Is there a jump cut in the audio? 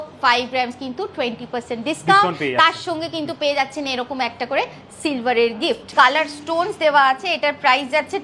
yes; 1 cut; at 5.9 s

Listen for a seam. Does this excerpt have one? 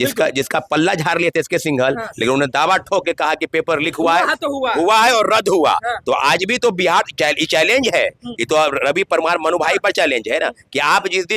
no; 0 cuts

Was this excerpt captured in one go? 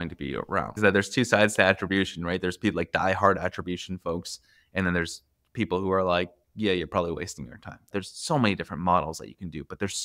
no; 2 cuts; at 0.8 s, 7.9 s

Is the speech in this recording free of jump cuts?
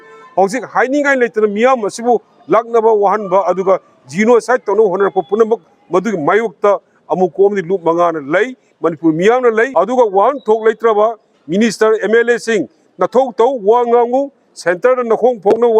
no; 1 cut; at 9.7 s

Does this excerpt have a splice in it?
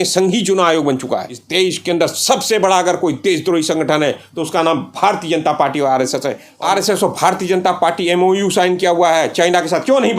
yes; 2 cuts; at 1.4 s, 6.5 s

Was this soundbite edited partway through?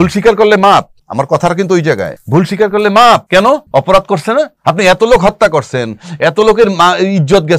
yes; 4 cuts; at 1.0 s, 2.1 s, 3.5 s, 4.5 s

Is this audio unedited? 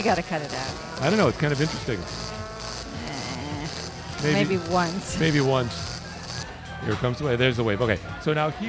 yes; 0 cuts

